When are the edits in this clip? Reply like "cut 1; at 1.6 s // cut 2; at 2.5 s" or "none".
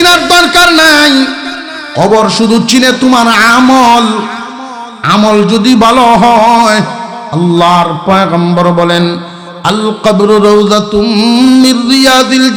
none